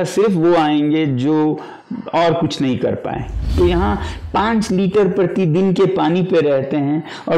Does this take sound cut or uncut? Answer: cut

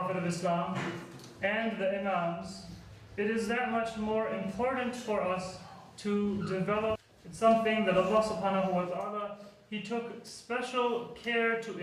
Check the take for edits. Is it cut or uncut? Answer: uncut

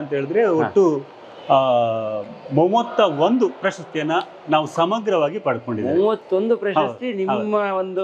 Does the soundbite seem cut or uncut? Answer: uncut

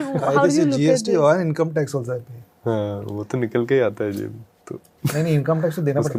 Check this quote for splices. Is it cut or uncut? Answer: uncut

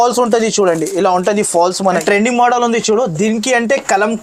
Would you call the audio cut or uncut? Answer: cut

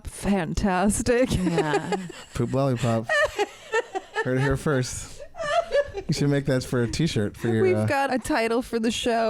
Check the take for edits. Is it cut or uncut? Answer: uncut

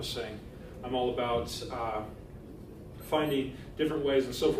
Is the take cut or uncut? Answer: cut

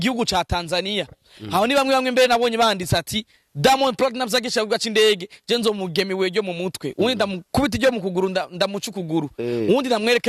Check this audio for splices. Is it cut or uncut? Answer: uncut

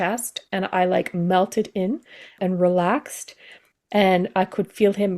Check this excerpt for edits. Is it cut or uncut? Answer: cut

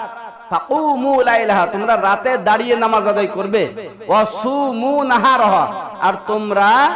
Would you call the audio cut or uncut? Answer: uncut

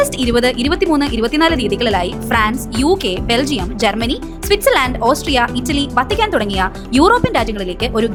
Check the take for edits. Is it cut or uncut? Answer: uncut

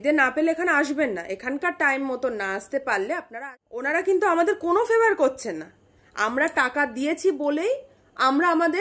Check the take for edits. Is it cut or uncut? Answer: cut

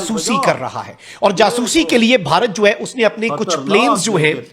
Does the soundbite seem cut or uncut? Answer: uncut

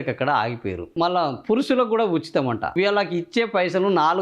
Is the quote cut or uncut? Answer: cut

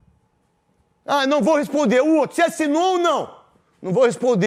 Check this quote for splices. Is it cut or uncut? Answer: uncut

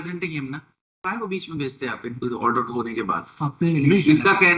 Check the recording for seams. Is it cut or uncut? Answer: cut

